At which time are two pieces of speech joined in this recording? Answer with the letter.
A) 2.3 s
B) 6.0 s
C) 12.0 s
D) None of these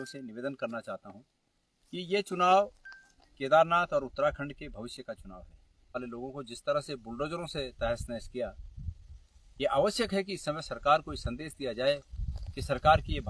B